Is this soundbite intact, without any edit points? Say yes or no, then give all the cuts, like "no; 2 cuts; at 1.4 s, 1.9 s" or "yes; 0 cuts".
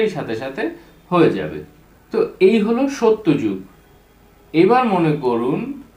yes; 0 cuts